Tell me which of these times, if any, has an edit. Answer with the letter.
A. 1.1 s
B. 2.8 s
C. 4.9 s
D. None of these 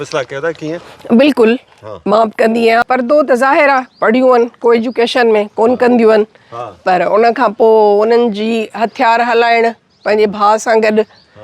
B